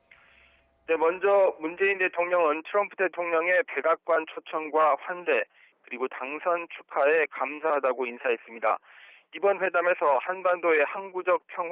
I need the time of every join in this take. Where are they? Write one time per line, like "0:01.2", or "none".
0:02.0